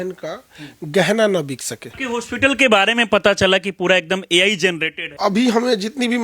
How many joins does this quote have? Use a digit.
2